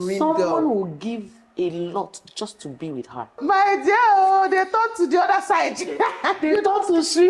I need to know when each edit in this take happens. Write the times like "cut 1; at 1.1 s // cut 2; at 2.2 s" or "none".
cut 1; at 3.3 s